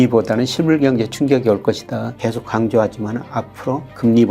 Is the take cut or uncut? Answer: cut